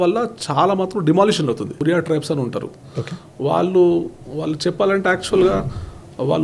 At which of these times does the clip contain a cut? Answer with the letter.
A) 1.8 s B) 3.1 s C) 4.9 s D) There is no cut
A